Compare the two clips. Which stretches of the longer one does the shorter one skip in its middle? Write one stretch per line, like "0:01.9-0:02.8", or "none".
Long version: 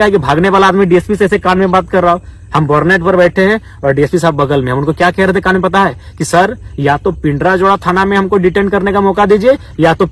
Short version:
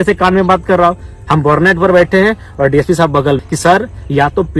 0:04.7-0:06.1